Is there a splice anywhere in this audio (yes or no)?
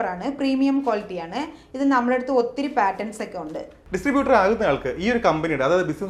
yes